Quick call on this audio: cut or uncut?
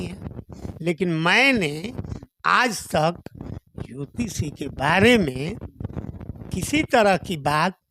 uncut